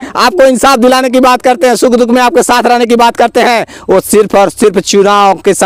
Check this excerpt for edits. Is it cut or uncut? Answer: uncut